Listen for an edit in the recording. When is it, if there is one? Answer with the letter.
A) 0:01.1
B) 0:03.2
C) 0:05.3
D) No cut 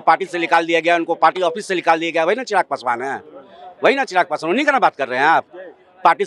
D